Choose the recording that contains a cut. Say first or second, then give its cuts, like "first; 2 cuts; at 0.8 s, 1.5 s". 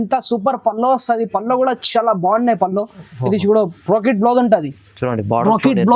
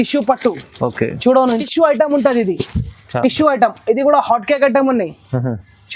second; 1 cut; at 1.6 s